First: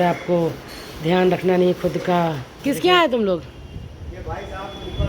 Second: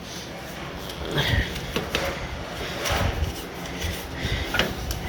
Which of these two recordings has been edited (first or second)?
first